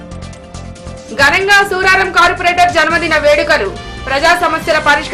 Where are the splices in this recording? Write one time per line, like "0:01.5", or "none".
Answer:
0:00.9